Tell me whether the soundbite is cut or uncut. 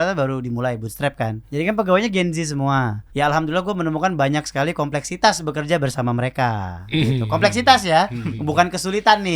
cut